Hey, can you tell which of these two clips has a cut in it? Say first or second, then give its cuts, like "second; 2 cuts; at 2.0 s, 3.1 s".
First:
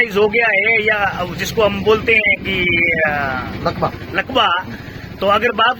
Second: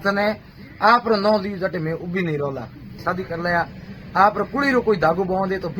second; 1 cut; at 2.8 s